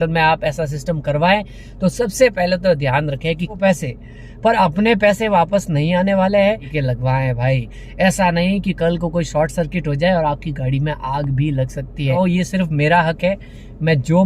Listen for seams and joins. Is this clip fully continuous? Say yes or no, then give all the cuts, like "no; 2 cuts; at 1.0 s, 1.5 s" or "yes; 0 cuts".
no; 3 cuts; at 3.6 s, 6.7 s, 12.1 s